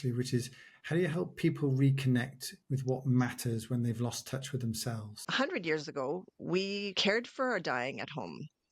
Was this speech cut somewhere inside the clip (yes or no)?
yes